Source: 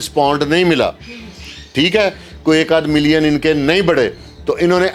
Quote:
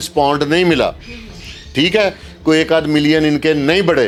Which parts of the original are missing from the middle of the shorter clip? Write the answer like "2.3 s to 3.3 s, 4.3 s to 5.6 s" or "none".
none